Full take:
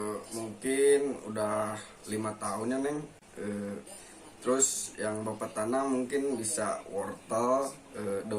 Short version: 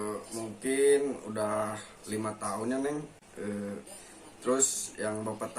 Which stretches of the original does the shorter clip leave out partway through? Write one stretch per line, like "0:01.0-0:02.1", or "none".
none

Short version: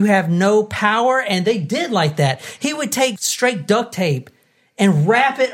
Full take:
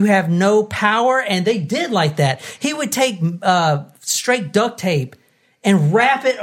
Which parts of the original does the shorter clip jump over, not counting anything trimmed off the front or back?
0:03.2-0:04.0

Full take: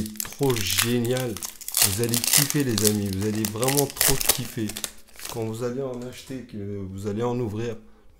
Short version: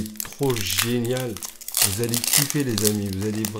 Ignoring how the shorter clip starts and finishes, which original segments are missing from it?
none

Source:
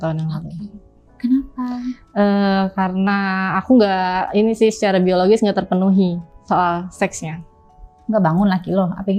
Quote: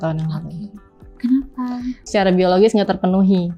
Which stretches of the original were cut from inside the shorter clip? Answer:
0:02.1-0:04.8

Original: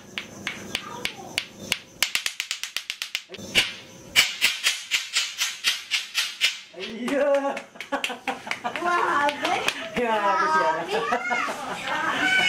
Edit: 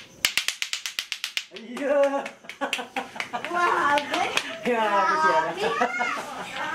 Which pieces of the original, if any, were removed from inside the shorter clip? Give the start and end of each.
0:03.4-0:06.9

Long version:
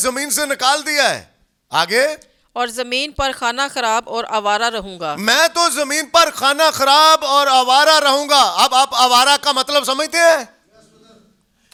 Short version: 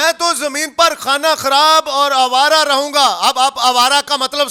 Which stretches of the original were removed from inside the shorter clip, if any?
none

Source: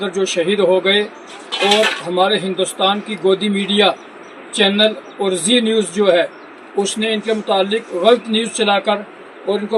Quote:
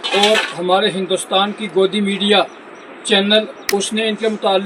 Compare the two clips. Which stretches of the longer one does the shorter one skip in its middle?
0:05.0-0:06.6

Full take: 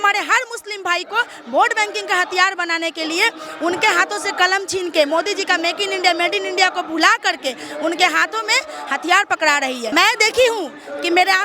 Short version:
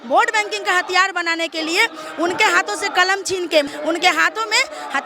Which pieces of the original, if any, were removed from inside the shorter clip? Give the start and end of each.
0:05.1-0:07.6

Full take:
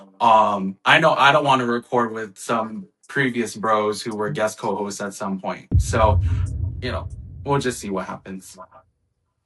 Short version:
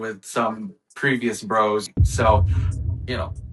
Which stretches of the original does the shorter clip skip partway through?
0:04.0-0:05.6

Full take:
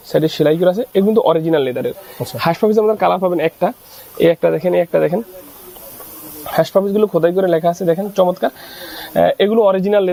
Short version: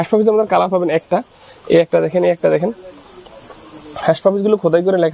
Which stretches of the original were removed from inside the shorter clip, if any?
none

